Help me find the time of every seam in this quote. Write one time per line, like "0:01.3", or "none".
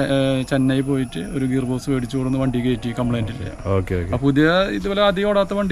none

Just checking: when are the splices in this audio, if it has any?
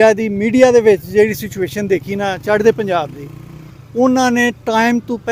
none

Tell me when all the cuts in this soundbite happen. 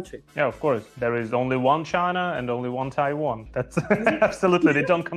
0:03.4

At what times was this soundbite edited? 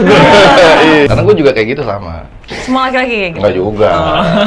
0:01.1

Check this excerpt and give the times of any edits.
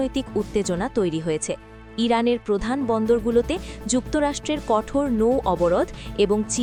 none

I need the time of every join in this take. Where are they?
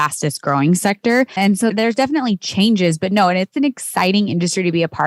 0:01.5

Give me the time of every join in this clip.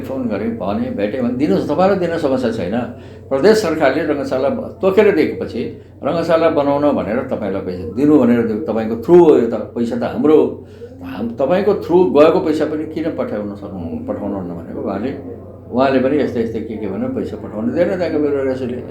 none

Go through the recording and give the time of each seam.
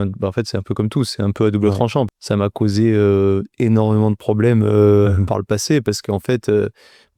0:02.1

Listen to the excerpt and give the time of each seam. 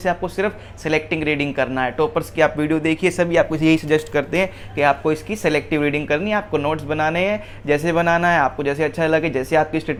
none

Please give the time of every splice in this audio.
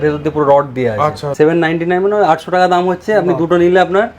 0:01.3

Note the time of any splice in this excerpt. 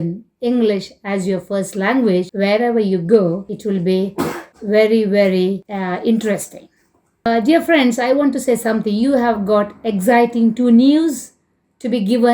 0:02.3
0:03.5
0:04.5
0:05.7
0:07.2

